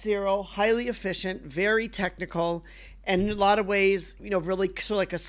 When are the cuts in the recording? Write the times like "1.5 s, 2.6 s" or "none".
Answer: 4.2 s